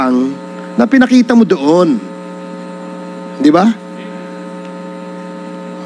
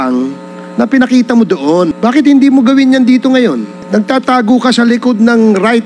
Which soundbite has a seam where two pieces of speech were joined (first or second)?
second